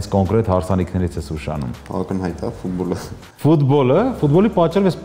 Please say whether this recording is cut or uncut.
cut